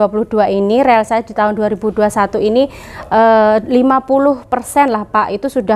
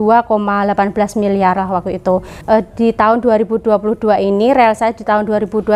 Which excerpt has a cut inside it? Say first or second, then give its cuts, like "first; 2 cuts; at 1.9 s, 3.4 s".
second; 1 cut; at 2.3 s